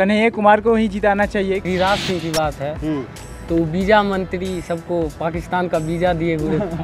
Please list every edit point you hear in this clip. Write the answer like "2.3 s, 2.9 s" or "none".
1.6 s

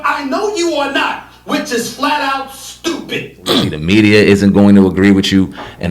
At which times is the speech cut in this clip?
3.8 s

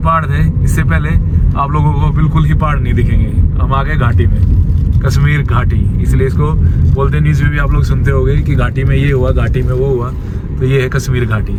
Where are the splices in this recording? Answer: none

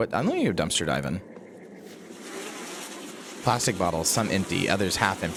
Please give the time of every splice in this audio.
none

